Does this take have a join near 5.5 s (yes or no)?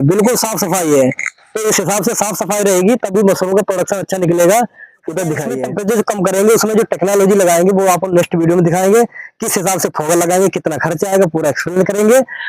yes